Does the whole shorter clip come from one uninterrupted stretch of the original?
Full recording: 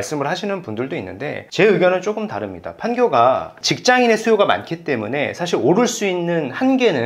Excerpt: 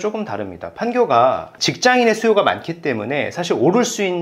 yes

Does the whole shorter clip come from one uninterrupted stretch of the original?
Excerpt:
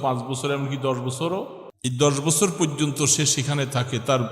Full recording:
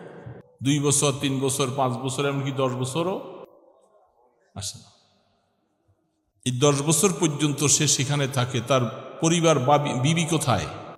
no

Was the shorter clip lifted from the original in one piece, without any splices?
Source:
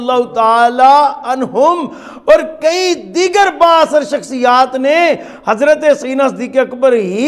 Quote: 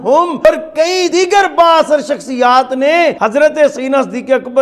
no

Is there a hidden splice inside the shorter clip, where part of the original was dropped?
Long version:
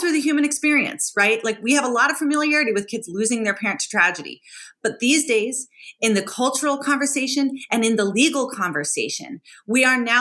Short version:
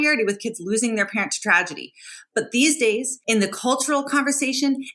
yes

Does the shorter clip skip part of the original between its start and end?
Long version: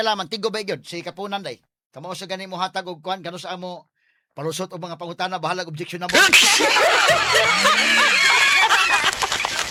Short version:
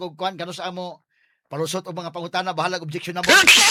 no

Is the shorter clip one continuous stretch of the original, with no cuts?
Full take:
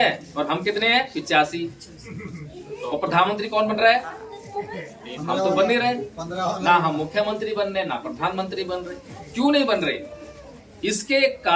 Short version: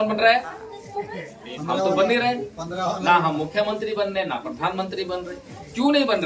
yes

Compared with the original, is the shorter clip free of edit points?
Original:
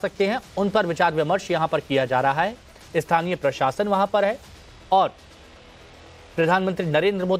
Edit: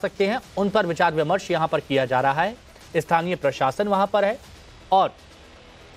yes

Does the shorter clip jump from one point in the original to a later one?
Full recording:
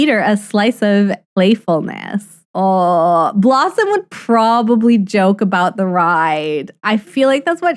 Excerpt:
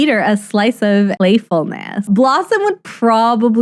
yes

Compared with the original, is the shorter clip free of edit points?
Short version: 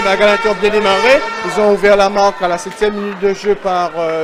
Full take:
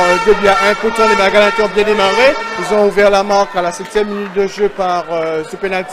yes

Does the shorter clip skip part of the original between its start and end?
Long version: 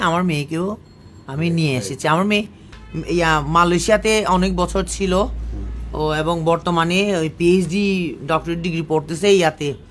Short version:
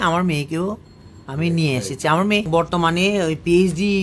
yes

